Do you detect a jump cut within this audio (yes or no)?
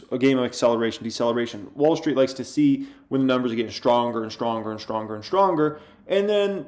no